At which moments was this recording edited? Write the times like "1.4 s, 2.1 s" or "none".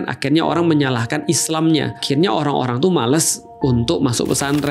2.0 s